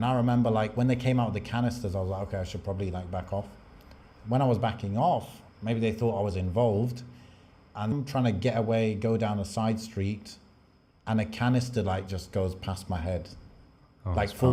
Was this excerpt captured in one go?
no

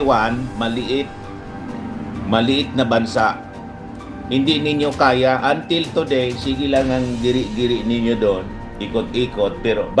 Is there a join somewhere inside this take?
no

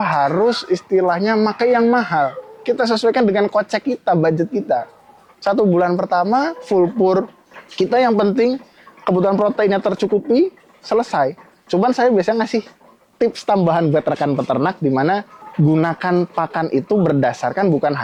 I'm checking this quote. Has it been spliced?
no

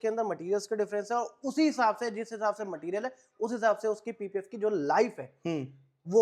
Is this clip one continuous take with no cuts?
yes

